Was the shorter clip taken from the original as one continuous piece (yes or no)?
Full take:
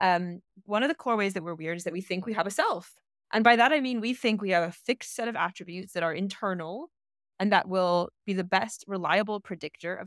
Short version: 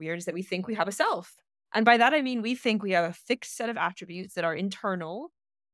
yes